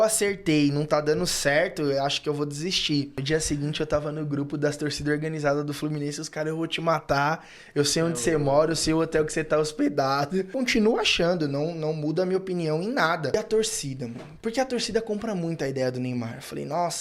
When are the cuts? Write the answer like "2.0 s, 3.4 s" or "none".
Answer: 3.2 s, 10.5 s, 13.3 s

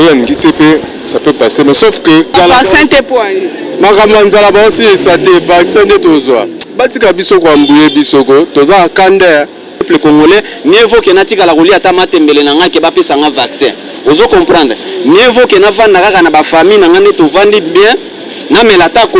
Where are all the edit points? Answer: 2.3 s, 9.9 s

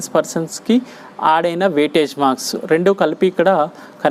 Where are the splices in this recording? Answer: none

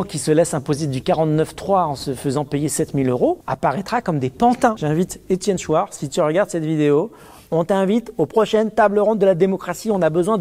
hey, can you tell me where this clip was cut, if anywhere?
3.5 s, 4.8 s

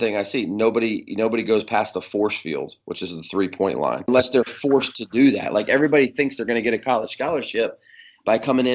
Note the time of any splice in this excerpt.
4.1 s

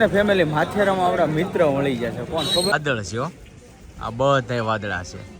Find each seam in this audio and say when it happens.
2.7 s

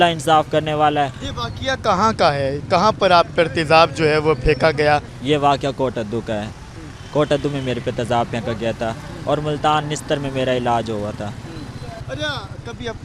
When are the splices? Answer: none

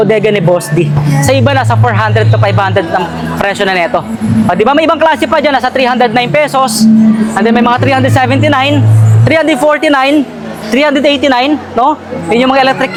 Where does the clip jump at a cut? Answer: none

